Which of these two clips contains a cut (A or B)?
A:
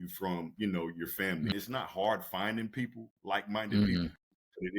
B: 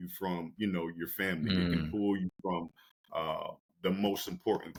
A